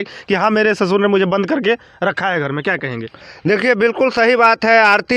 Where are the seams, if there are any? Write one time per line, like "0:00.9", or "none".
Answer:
none

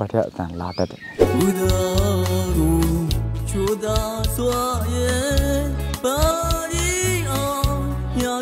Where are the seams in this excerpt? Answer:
0:01.3

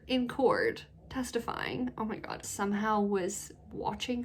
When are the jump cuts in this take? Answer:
0:02.4

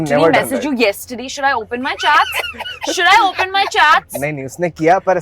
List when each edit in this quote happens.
none

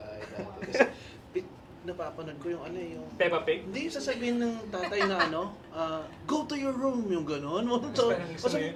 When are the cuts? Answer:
none

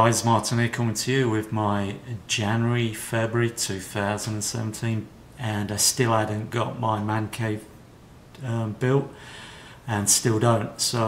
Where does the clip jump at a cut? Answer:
none

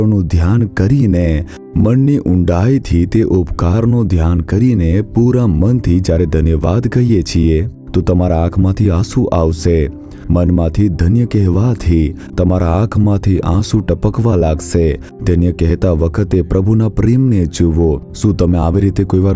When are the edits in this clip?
none

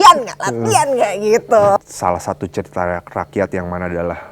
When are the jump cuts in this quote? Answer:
0:01.8

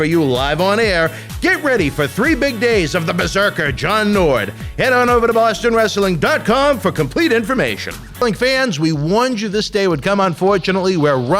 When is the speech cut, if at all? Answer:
0:08.0

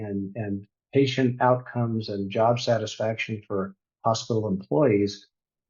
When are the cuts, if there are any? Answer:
none

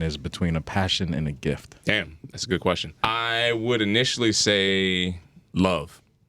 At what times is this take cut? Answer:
0:02.9
0:05.3

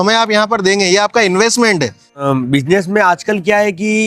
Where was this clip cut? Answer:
0:02.2

